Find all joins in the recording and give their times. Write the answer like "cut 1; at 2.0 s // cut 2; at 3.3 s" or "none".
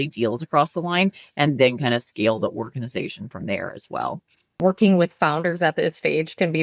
cut 1; at 4.5 s